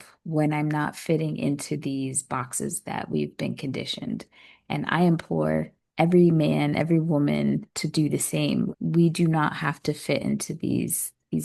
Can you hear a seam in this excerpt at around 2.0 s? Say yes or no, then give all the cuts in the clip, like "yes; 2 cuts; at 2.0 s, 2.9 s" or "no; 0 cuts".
no; 0 cuts